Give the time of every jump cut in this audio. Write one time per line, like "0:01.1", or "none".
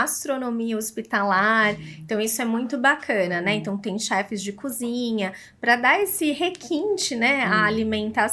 none

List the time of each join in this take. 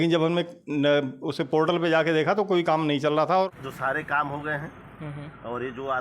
0:03.5

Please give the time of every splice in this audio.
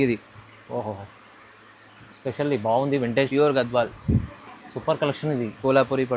0:03.3

